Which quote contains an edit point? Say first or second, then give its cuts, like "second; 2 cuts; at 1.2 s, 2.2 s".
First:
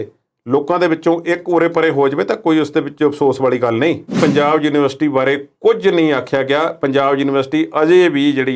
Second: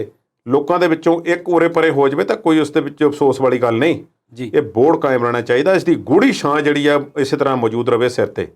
first; 1 cut; at 4.2 s